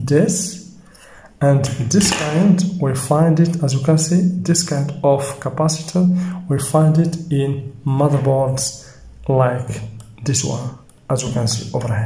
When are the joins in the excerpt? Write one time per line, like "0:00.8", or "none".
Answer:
none